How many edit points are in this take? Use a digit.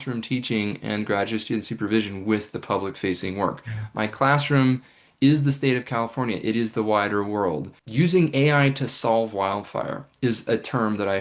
1